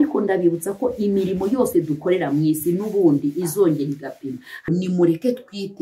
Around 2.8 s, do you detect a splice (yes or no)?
no